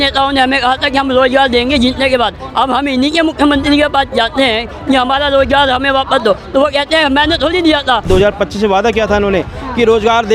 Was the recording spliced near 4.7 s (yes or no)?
no